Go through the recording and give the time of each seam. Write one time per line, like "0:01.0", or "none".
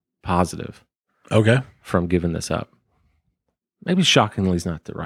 none